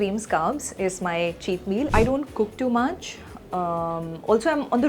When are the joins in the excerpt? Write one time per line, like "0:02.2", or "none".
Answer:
0:01.9